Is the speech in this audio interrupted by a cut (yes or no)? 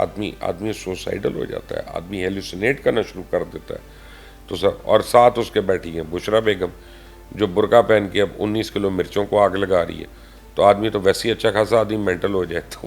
no